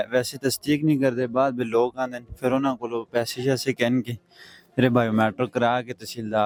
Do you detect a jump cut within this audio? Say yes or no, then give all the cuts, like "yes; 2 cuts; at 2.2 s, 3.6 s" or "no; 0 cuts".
no; 0 cuts